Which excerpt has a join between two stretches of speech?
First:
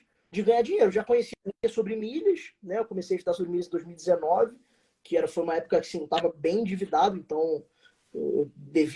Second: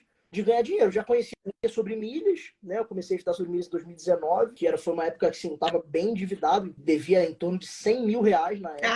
second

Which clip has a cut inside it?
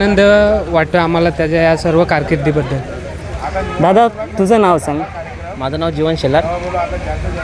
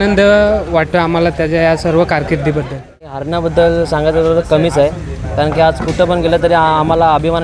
second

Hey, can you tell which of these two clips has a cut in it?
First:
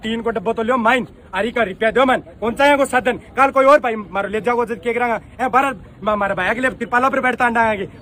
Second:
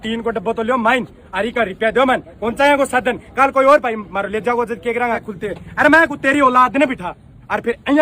second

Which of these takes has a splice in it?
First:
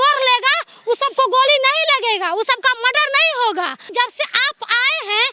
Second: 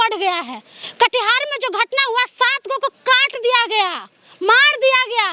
first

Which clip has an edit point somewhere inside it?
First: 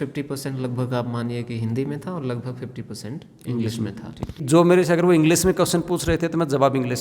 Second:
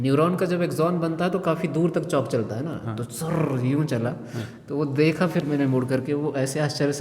first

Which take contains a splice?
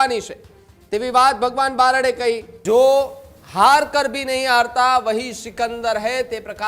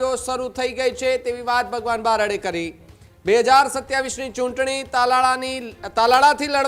first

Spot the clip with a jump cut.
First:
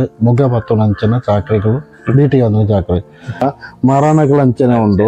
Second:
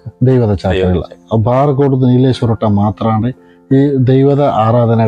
first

